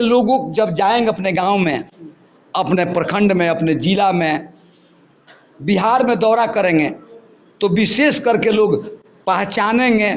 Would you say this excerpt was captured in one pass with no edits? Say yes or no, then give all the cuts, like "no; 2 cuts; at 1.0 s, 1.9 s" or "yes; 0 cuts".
yes; 0 cuts